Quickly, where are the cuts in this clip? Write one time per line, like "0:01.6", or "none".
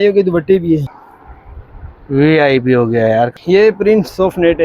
0:00.9
0:03.3